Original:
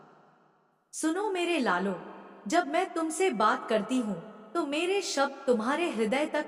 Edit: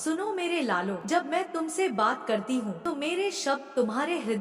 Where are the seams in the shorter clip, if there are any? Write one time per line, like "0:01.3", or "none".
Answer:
0:01.0
0:02.8